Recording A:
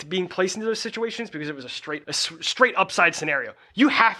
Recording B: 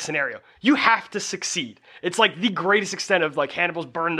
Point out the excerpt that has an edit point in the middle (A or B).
A